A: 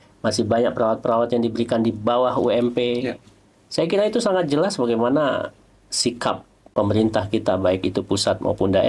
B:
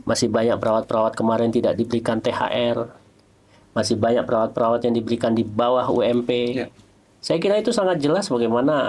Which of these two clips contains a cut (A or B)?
A